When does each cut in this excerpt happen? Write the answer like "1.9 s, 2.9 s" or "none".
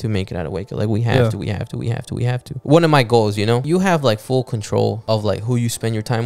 2.5 s, 3.6 s, 5.0 s